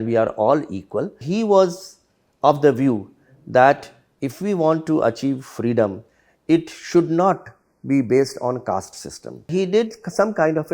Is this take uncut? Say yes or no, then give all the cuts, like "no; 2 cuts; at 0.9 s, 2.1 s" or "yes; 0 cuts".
no; 2 cuts; at 1.2 s, 9.5 s